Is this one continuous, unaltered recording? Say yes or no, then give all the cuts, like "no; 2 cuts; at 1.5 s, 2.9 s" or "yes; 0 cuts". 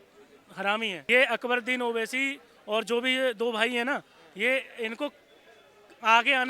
no; 1 cut; at 1.0 s